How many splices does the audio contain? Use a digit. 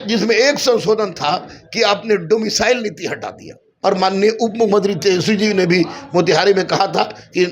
1